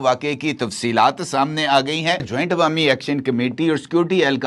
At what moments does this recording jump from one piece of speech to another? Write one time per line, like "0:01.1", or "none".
0:02.3